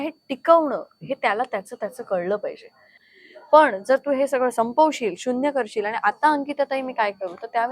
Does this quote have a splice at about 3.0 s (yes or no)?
yes